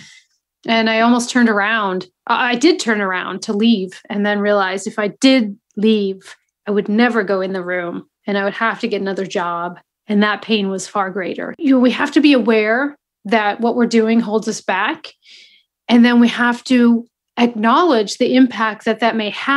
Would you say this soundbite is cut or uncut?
cut